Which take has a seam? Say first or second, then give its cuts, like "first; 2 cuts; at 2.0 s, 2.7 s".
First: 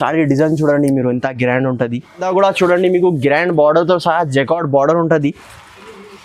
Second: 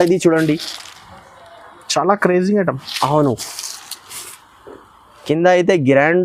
first; 1 cut; at 2.2 s